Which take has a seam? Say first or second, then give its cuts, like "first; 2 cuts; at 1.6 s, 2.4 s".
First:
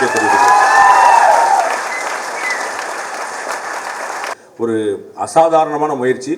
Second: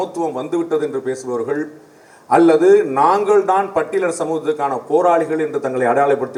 first; 1 cut; at 4.4 s